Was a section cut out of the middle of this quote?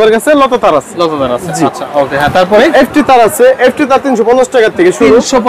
no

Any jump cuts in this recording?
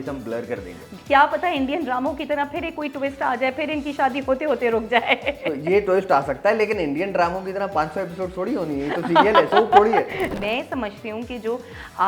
yes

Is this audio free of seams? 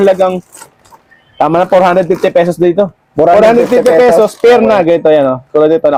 yes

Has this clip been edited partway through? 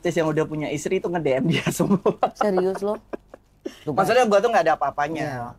no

